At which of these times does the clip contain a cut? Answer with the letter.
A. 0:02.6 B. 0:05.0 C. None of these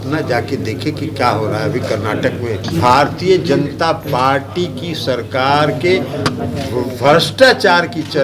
A